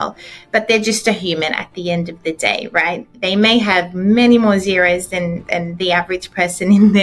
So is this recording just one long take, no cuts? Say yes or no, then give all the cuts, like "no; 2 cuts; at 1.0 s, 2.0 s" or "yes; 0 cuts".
yes; 0 cuts